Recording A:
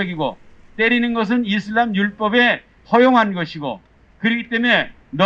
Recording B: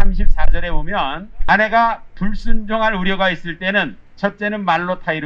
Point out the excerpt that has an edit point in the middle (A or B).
B